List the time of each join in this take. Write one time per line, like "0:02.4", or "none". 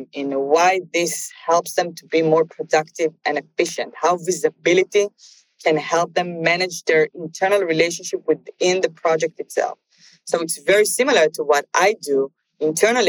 none